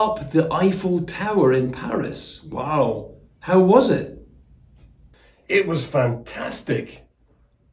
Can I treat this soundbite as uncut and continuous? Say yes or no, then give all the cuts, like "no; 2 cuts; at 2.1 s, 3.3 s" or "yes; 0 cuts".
yes; 0 cuts